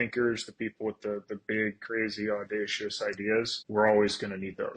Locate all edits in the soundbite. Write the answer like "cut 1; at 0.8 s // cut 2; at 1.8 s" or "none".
cut 1; at 3.6 s